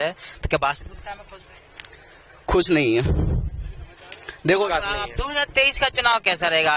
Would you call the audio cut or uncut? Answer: cut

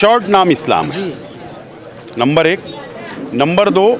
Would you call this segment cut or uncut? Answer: uncut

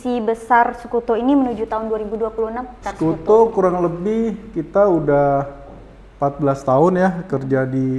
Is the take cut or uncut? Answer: cut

